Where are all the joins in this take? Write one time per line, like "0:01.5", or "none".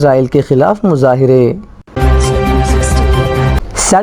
0:01.9